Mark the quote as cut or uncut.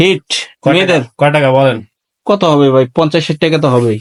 uncut